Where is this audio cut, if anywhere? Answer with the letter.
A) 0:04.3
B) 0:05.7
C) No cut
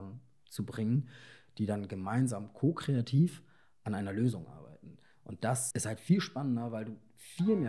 B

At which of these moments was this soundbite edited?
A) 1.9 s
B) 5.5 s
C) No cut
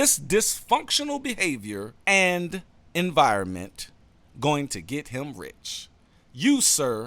A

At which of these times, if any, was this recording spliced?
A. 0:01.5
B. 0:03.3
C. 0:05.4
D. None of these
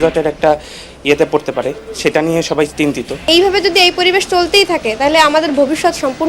B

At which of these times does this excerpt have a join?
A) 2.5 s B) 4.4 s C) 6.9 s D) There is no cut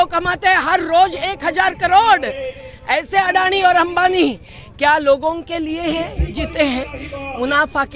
D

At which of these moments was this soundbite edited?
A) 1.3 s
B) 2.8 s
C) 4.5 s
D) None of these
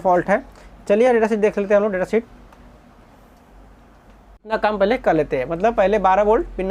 C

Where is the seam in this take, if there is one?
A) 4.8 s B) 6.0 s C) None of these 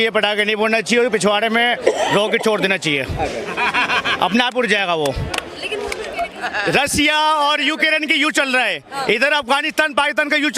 B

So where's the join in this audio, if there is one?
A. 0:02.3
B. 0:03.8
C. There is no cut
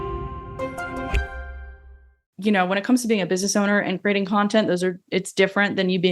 A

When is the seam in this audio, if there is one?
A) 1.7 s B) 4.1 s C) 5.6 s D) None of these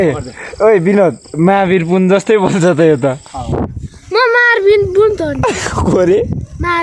C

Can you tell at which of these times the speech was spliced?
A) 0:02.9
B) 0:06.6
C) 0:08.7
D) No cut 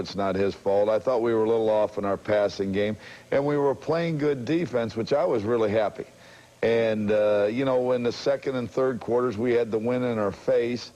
A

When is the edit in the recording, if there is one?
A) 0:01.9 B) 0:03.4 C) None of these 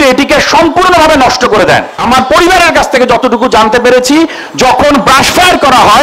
A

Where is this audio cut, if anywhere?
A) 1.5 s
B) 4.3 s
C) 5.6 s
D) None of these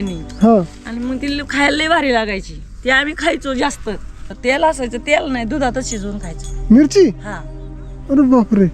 B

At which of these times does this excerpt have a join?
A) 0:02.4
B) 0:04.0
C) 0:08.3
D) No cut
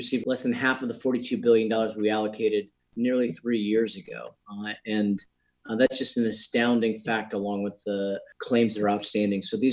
C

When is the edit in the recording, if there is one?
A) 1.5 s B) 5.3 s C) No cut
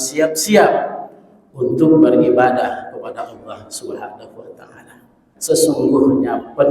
B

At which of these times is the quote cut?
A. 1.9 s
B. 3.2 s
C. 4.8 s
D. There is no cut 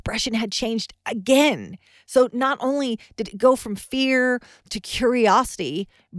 D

